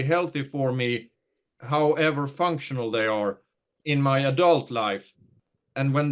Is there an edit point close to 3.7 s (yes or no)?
yes